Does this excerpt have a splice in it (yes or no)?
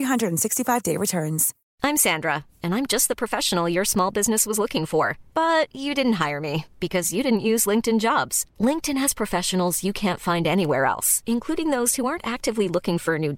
yes